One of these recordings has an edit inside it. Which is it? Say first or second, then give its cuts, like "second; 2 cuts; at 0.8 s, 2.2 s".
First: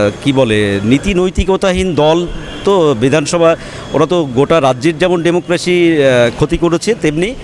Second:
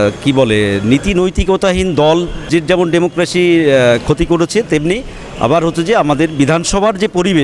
second; 1 cut; at 2.5 s